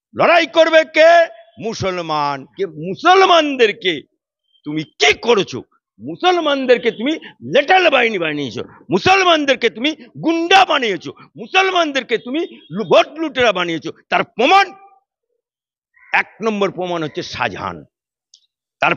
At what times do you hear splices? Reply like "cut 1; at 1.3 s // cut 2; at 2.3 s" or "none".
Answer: cut 1; at 2.5 s